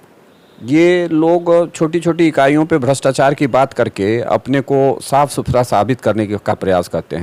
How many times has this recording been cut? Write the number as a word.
zero